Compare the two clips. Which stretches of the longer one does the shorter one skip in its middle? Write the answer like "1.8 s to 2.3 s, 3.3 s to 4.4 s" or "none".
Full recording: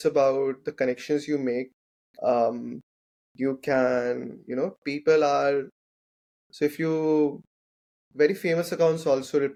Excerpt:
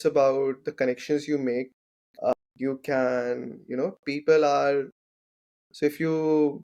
2.3 s to 3.1 s